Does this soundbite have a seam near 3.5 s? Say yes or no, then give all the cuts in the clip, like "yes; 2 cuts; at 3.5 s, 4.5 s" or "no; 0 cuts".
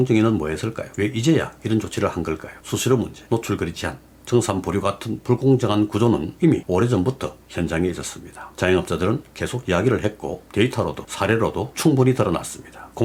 no; 0 cuts